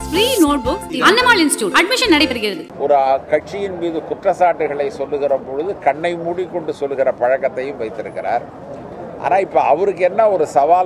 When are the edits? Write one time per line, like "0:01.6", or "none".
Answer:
0:02.6